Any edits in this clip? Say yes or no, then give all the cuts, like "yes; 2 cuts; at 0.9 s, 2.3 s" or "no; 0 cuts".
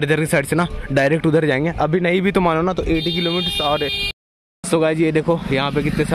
yes; 1 cut; at 4.1 s